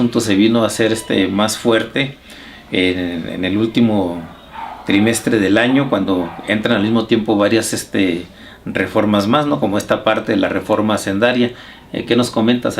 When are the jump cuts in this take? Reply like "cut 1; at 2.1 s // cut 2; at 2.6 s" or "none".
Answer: cut 1; at 10.9 s